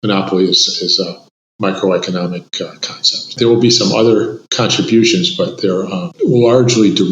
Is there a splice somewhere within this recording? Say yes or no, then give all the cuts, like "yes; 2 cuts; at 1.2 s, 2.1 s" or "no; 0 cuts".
yes; 3 cuts; at 3.3 s, 4.4 s, 6.0 s